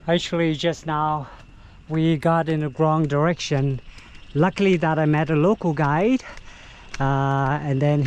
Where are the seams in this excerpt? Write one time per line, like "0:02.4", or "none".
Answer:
none